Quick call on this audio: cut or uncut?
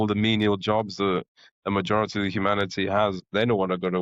uncut